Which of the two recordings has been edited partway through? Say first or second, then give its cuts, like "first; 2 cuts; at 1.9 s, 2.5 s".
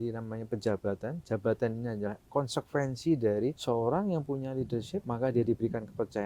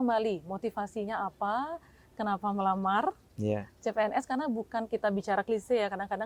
first; 2 cuts; at 3.6 s, 5.0 s